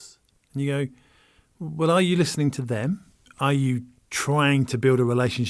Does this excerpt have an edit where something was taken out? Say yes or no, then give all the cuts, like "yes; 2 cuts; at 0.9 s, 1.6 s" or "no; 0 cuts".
yes; 1 cut; at 3.3 s